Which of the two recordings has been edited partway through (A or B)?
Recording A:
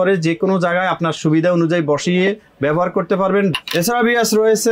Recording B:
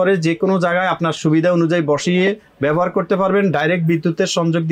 A